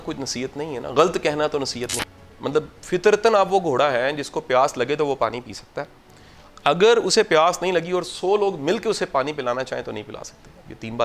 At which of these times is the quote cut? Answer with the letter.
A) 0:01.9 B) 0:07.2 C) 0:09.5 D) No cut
A